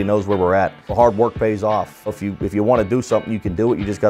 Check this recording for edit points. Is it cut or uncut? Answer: cut